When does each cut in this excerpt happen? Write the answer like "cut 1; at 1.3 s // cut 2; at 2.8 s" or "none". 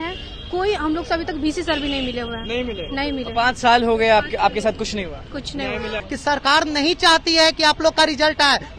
cut 1; at 6.0 s